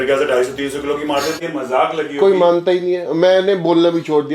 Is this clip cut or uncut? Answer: cut